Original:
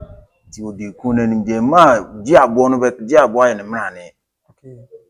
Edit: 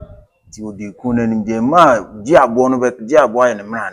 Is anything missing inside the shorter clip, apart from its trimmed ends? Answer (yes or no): no